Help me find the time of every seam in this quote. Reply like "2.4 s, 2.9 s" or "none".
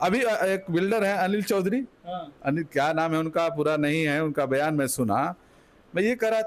none